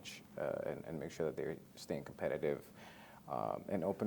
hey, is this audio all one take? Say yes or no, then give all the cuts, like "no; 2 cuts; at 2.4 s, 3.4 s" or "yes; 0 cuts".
yes; 0 cuts